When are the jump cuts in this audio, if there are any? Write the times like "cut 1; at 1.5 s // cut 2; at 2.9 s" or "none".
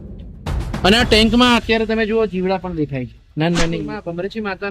cut 1; at 3.8 s

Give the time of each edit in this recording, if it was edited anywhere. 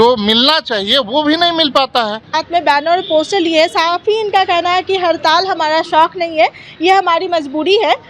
cut 1; at 2.4 s

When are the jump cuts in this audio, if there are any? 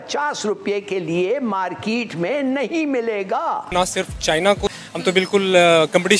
cut 1; at 3.7 s // cut 2; at 4.7 s

